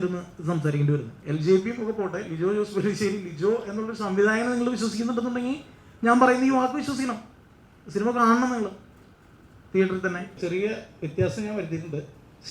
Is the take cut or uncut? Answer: cut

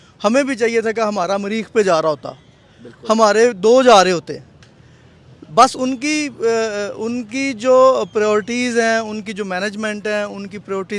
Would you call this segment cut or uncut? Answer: uncut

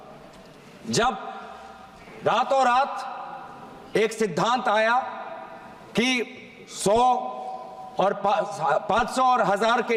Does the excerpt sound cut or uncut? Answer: uncut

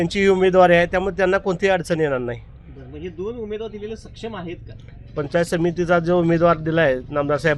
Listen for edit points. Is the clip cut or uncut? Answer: uncut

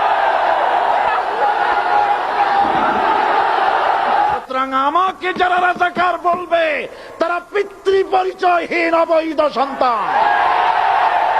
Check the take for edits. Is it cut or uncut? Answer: cut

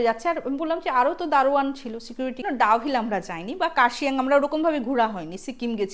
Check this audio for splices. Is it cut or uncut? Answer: cut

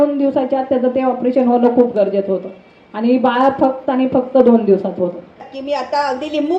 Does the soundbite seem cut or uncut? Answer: cut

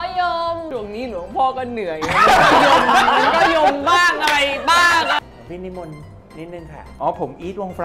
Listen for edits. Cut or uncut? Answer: cut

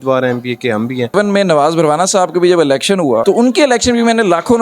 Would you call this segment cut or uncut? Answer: cut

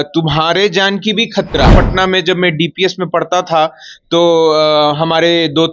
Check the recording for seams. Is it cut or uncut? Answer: cut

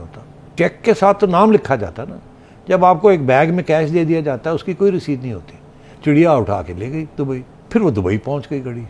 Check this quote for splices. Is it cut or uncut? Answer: cut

